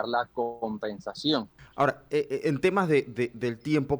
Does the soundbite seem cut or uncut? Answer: cut